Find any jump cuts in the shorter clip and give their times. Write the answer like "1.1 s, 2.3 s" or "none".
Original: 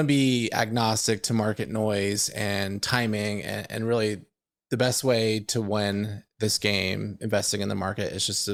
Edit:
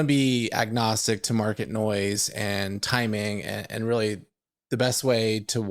none